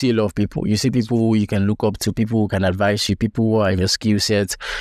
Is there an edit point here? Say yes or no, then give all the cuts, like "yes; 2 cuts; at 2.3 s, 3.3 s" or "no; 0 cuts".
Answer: no; 0 cuts